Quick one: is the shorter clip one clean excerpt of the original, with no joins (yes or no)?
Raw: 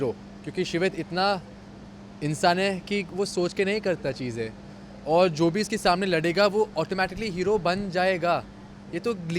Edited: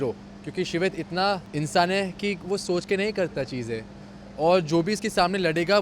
no